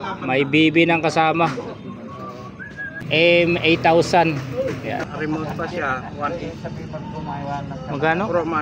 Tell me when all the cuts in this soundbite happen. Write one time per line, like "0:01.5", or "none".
0:03.0
0:05.1